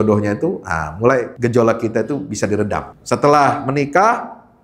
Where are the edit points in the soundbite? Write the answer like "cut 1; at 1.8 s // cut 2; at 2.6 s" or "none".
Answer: cut 1; at 1.3 s // cut 2; at 2.9 s